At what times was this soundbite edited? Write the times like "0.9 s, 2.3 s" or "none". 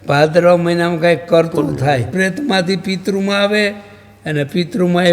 2.1 s